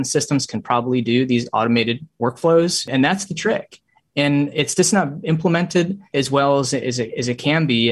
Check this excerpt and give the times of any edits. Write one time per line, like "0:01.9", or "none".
0:02.9
0:06.1